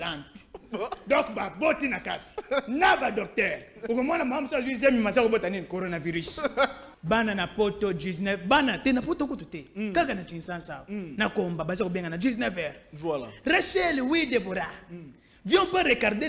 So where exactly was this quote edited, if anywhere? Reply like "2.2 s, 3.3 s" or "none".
6.9 s